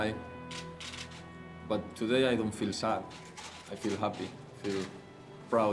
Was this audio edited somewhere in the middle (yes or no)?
no